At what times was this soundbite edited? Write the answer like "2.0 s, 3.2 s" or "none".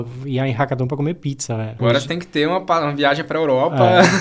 1.7 s